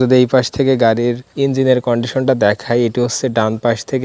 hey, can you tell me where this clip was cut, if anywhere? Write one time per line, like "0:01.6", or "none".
0:01.3